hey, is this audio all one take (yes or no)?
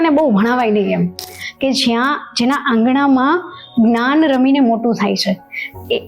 no